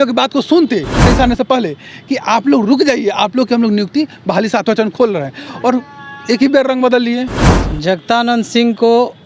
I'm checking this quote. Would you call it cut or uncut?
cut